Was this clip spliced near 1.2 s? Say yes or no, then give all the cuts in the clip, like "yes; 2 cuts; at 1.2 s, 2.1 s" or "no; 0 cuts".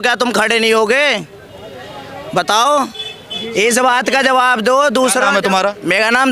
no; 0 cuts